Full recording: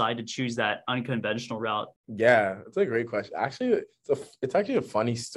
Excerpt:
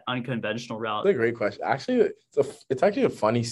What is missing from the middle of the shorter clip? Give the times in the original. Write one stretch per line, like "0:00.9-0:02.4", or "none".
0:01.7-0:02.7